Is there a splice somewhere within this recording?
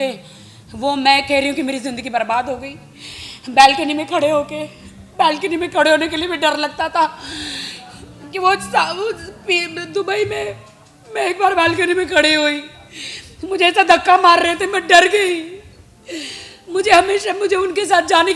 no; 0 cuts

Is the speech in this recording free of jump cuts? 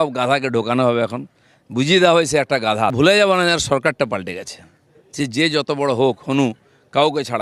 no; 1 cut; at 2.9 s

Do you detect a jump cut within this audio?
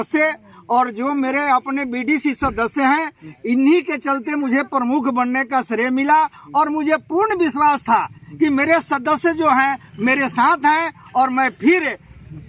no; 0 cuts

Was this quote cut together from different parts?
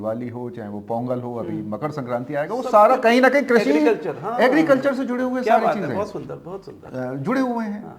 no; 0 cuts

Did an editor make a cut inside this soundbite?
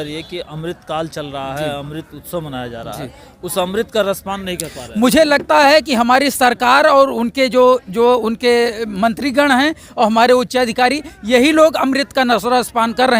no; 0 cuts

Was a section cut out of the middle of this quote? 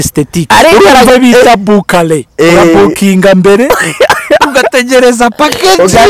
yes; 1 cut; at 1.1 s

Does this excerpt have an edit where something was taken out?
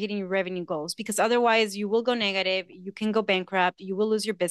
no; 0 cuts

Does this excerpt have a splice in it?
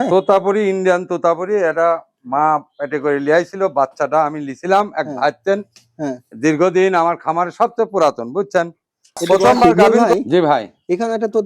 yes; 1 cut; at 9.7 s

